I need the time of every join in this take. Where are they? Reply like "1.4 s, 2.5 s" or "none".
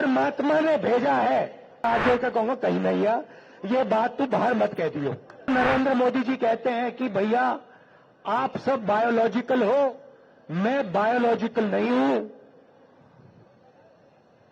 1.8 s, 5.5 s